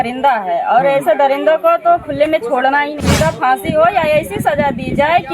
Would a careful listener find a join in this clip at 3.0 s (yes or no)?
yes